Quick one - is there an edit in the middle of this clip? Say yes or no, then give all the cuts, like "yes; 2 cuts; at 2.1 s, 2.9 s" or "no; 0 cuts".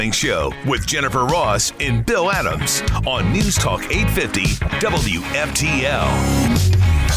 no; 0 cuts